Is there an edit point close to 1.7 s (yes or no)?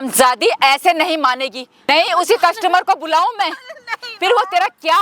yes